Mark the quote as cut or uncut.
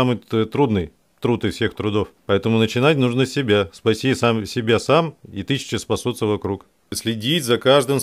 cut